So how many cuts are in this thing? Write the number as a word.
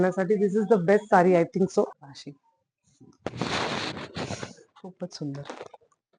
one